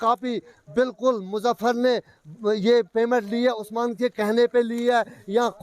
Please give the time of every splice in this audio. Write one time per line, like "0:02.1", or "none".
none